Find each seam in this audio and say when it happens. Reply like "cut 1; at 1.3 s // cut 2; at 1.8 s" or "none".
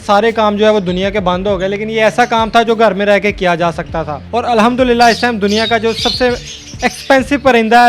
cut 1; at 4.2 s